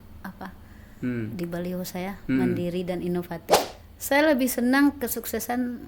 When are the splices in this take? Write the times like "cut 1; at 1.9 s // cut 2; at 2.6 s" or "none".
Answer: cut 1; at 3.7 s